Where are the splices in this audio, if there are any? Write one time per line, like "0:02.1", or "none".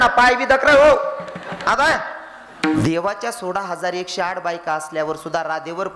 0:02.8